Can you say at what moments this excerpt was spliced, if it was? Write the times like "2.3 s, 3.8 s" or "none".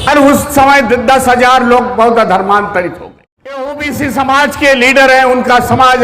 3.6 s